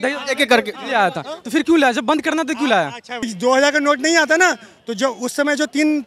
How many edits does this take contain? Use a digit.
1